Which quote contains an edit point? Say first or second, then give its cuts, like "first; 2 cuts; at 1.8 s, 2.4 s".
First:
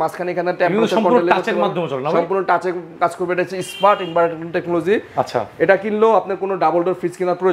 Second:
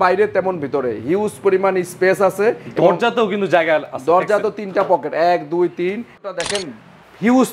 second; 1 cut; at 6.3 s